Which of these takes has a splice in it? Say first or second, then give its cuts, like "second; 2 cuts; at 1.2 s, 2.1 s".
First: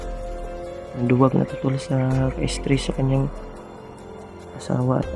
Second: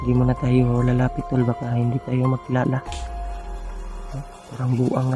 first; 1 cut; at 1.0 s